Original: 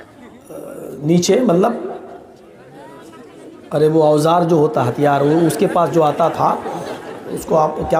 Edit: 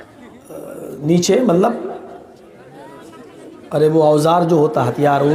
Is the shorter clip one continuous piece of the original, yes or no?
yes